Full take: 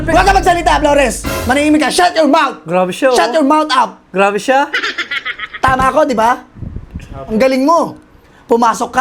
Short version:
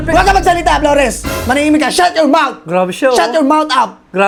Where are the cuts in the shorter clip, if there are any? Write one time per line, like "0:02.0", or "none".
none